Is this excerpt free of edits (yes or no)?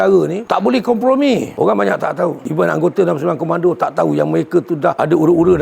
no